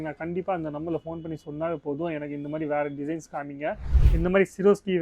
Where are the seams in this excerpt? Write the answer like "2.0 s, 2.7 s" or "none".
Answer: 3.9 s

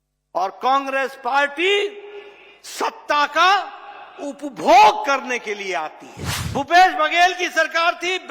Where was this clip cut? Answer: 6.3 s

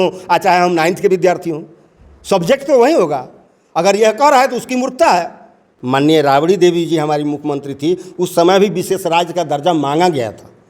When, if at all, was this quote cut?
5.7 s

